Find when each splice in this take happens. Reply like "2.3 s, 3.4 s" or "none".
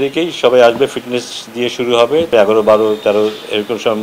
2.3 s